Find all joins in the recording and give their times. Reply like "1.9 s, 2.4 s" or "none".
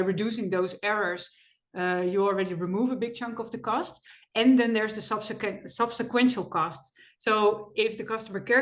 none